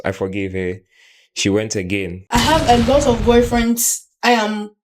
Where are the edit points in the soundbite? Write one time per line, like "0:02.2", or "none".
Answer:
0:02.3